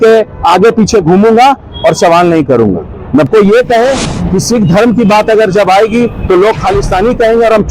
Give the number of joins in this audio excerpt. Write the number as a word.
one